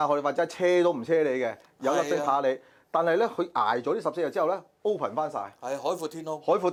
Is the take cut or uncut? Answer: uncut